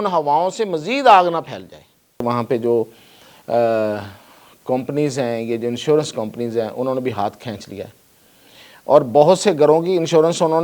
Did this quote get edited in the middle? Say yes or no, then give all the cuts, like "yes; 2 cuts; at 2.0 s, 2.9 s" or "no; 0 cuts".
yes; 1 cut; at 2.2 s